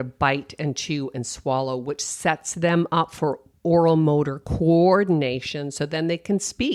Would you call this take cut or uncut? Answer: uncut